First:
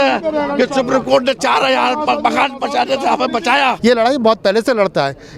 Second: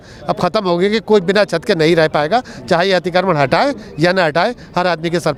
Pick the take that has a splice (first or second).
first